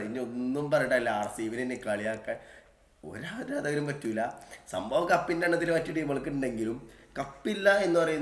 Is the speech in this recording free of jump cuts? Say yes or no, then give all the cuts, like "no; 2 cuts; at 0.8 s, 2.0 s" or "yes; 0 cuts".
yes; 0 cuts